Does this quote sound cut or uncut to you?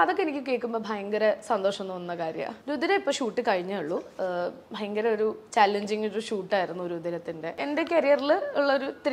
cut